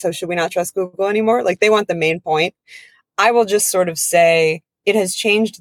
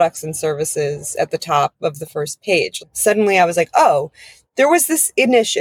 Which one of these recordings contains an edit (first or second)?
second